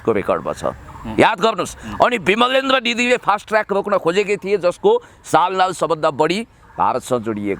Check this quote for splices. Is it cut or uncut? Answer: uncut